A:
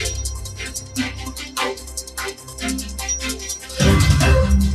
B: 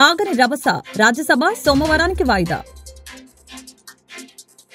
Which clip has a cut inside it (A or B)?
A